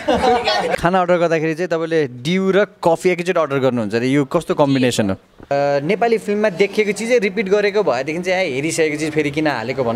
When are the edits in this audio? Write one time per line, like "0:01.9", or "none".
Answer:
0:00.8
0:05.5